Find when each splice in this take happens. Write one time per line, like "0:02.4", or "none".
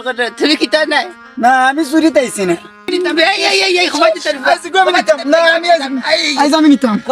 0:02.9